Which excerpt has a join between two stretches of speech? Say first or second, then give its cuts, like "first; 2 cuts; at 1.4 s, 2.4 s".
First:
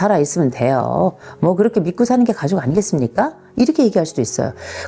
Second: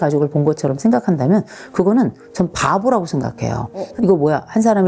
second; 1 cut; at 3.9 s